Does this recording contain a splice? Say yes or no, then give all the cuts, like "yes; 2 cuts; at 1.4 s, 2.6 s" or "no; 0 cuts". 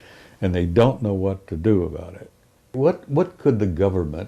yes; 1 cut; at 2.7 s